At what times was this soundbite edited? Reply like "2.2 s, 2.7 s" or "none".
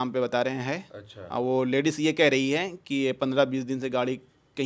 none